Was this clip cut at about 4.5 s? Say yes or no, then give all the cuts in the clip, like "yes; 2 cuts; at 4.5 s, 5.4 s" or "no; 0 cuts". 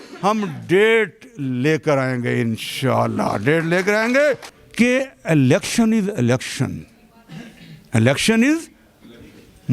yes; 1 cut; at 4.5 s